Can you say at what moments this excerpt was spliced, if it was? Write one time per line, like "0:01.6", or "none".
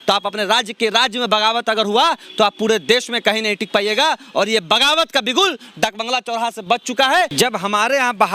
0:07.3